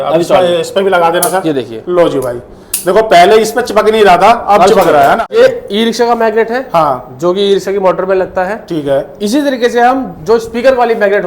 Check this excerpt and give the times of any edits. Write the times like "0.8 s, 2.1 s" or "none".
5.3 s